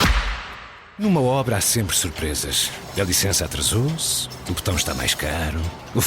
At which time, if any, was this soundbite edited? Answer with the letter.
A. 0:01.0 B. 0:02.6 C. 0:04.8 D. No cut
A